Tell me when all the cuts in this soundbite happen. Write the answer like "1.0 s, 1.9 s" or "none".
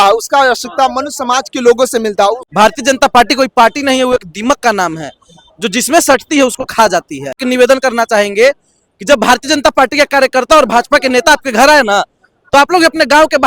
2.4 s, 7.3 s